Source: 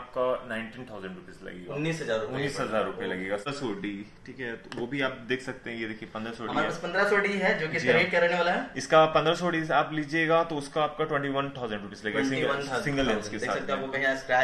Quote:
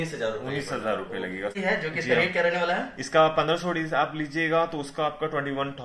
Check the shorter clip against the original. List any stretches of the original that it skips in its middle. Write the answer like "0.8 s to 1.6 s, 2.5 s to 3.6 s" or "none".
3.4 s to 7.3 s